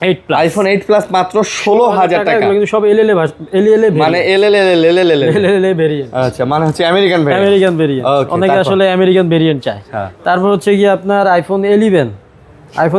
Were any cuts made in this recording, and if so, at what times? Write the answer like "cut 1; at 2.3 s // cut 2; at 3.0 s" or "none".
none